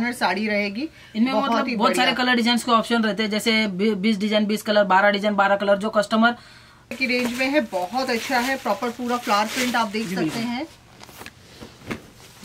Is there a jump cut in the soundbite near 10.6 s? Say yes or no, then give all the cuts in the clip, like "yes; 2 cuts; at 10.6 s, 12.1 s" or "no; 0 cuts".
no; 1 cut; at 7.0 s